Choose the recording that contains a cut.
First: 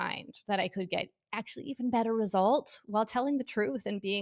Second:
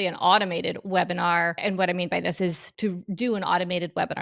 second; 2 cuts; at 1.6 s, 2.7 s

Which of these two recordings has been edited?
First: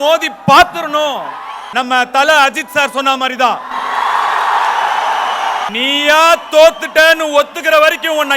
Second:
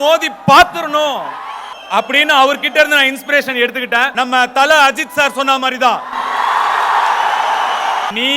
first; 1 cut; at 1.7 s

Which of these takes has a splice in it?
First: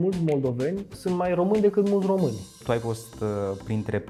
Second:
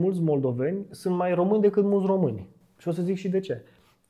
first; 1 cut; at 2.6 s

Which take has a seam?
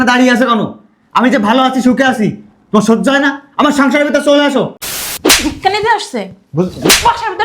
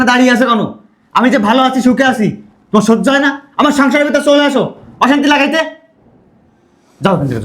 first; 1 cut; at 4.8 s

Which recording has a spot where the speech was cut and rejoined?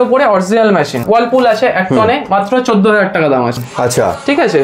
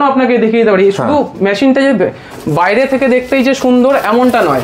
first; 2 cuts; at 1.0 s, 3.6 s

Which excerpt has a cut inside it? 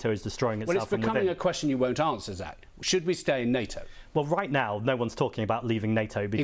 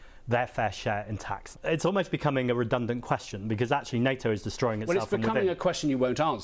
second; 1 cut; at 1.5 s

